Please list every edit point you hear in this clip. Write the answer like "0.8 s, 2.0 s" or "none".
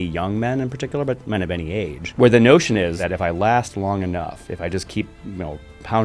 2.0 s, 3.0 s